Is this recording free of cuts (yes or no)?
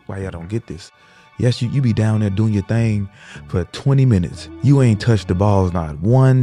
no